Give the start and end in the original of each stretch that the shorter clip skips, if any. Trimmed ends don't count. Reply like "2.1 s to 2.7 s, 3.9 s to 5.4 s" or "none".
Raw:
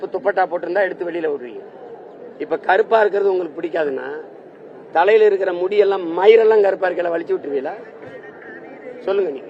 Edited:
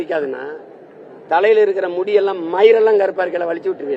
none